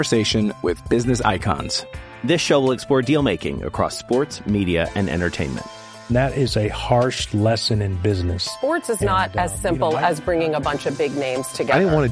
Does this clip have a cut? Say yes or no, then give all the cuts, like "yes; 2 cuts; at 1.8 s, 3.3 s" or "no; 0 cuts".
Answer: no; 0 cuts